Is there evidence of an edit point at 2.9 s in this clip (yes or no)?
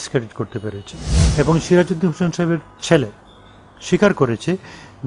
no